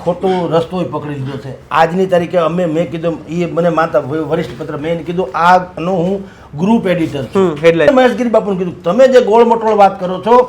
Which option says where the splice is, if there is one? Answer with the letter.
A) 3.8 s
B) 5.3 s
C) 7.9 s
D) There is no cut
C